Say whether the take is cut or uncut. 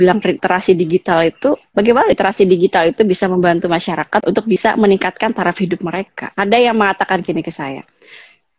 cut